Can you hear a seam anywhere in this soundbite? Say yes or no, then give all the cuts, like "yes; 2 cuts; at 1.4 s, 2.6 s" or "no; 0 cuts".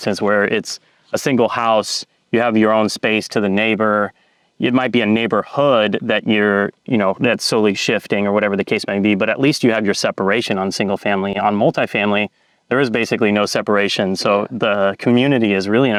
no; 0 cuts